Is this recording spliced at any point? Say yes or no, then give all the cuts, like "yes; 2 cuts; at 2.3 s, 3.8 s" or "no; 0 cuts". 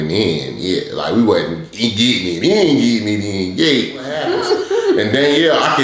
yes; 1 cut; at 4.2 s